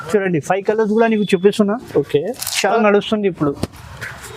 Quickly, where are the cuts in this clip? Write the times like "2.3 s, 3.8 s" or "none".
2.6 s